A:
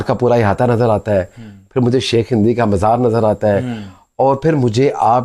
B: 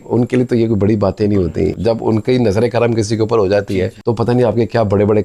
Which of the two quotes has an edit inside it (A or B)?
B